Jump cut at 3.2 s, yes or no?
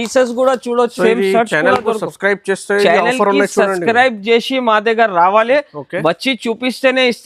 no